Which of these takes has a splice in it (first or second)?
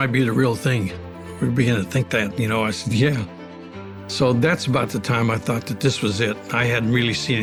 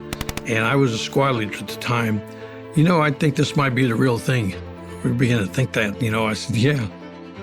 second